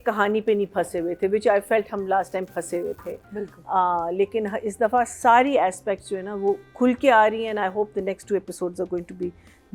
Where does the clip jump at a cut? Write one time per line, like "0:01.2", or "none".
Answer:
none

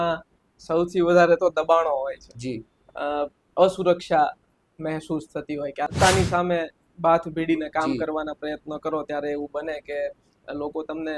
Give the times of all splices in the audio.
0:05.9

